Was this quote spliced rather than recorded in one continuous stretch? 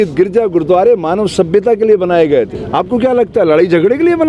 yes; 1 cut; at 2.6 s

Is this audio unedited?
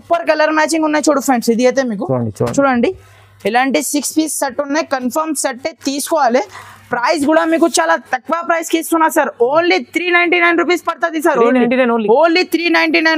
yes; 0 cuts

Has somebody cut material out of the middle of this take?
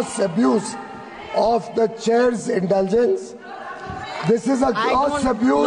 no; 0 cuts

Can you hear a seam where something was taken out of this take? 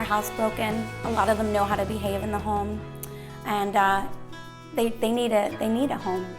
no; 0 cuts

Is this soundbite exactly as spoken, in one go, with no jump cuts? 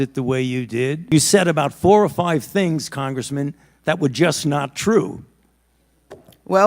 no; 1 cut; at 1.1 s

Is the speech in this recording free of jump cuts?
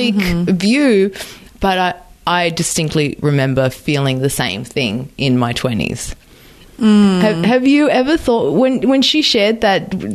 yes; 0 cuts

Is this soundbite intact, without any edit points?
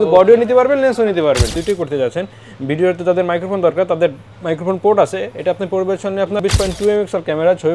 no; 2 cuts; at 1.6 s, 6.4 s

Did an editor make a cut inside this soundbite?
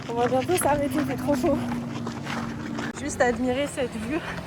no; 0 cuts

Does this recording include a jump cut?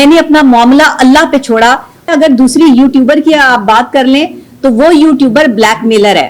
yes; 1 cut; at 2.1 s

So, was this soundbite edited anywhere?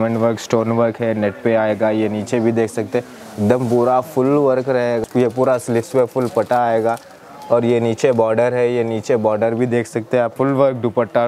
yes; 2 cuts; at 5.0 s, 10.3 s

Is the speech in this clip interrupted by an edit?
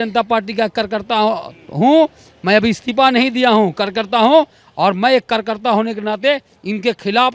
no; 0 cuts

